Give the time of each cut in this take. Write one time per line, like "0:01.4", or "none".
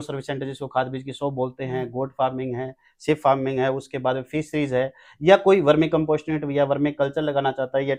none